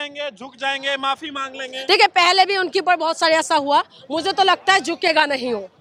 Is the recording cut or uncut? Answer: uncut